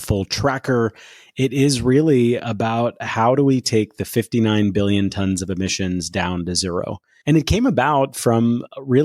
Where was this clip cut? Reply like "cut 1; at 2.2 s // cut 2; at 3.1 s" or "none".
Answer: cut 1; at 7.1 s